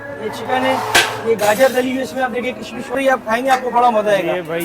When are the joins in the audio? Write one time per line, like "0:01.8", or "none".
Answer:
0:02.9